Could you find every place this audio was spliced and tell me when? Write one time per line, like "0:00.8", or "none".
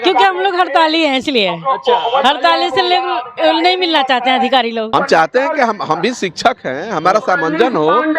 0:04.9